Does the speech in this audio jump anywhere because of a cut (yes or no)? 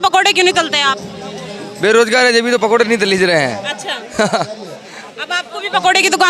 no